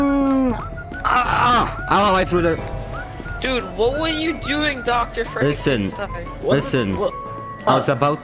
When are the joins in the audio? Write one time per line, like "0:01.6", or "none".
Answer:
none